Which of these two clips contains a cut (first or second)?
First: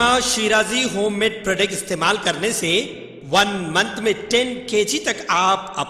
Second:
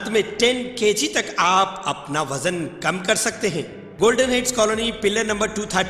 second